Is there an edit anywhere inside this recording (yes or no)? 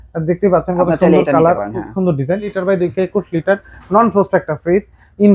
yes